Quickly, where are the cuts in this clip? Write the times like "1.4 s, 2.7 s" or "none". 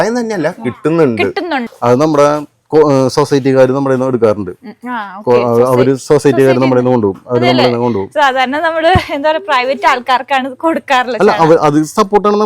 1.6 s